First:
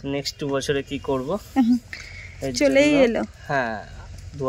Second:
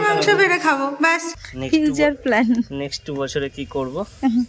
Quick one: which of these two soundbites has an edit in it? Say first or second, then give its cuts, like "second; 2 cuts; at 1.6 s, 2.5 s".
second; 1 cut; at 1.3 s